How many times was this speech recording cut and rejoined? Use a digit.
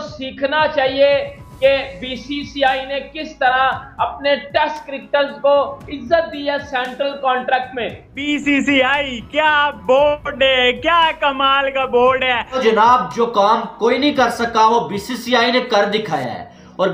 2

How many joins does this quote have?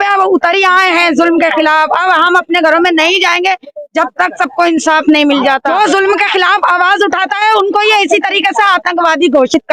1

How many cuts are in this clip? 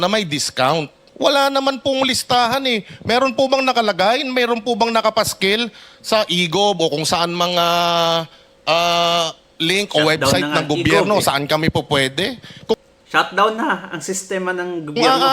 1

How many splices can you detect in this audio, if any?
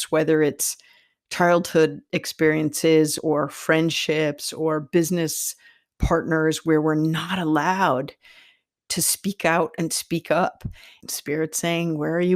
3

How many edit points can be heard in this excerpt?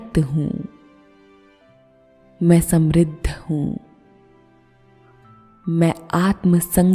2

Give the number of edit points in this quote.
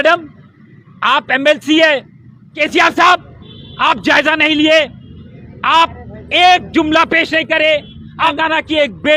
2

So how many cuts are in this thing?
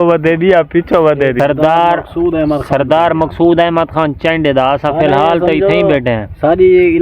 1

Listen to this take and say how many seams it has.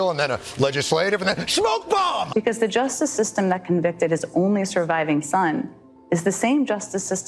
1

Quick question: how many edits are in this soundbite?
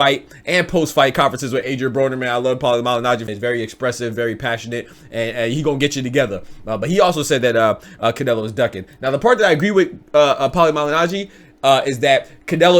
1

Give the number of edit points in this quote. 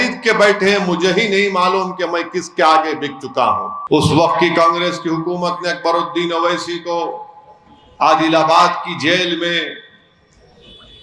1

